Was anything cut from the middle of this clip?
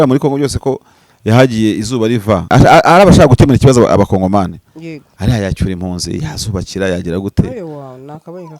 yes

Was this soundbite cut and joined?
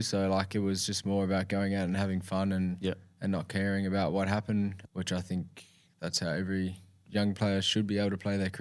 yes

